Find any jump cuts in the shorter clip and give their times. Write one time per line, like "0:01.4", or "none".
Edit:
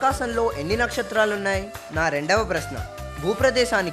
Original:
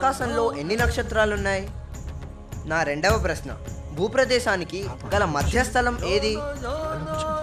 0:01.8